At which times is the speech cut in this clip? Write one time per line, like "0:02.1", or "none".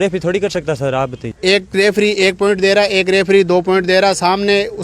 0:01.2